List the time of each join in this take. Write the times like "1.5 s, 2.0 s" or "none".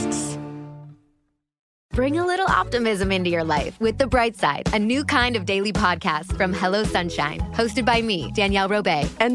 1.6 s